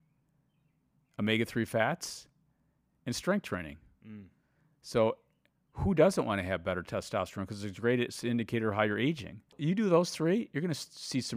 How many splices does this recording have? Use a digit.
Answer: 1